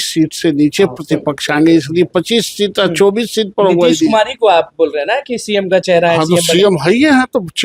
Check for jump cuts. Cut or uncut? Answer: uncut